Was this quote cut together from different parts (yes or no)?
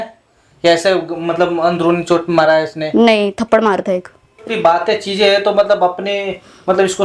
yes